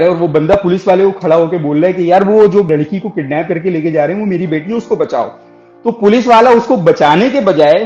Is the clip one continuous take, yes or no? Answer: no